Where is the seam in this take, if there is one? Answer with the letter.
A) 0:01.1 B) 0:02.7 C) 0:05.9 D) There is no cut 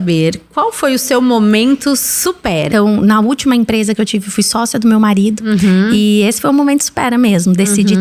B